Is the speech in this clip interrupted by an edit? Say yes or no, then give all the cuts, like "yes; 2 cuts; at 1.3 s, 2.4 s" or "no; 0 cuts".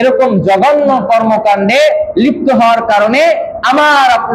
no; 0 cuts